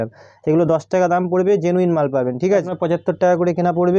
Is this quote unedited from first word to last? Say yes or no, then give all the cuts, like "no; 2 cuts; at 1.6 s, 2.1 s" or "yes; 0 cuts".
no; 1 cut; at 2.7 s